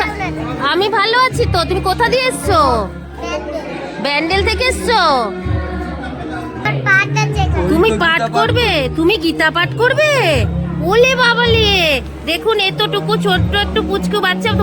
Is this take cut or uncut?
cut